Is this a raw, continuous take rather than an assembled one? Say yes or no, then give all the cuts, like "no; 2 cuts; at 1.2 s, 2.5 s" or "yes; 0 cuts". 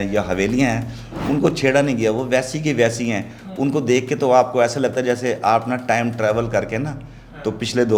yes; 0 cuts